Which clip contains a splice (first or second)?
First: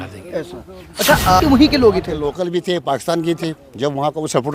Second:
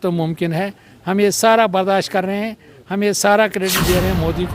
first